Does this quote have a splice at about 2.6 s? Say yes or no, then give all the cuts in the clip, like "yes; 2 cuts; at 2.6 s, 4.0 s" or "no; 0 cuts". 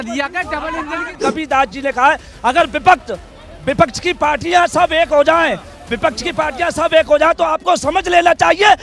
no; 1 cut; at 1.1 s